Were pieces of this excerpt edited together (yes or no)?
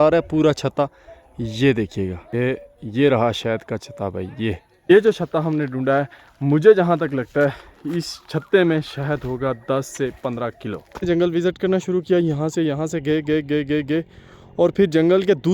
yes